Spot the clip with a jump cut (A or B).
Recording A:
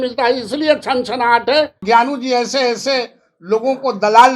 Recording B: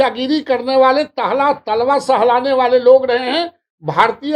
A